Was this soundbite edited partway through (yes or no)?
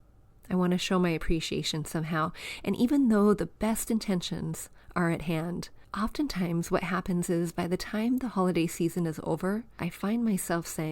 yes